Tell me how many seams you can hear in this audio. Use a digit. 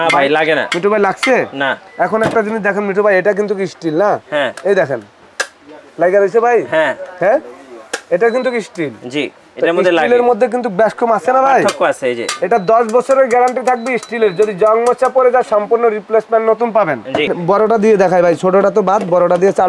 1